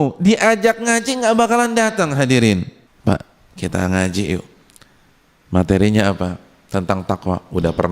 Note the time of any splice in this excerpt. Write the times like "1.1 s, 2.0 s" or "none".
2.8 s